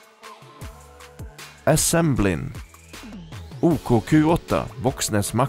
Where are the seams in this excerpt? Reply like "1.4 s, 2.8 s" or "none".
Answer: 1.6 s